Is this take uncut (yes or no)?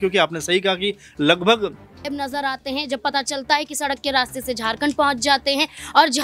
no